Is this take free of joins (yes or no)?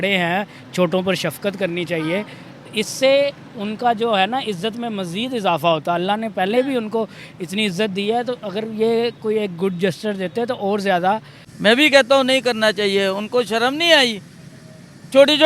no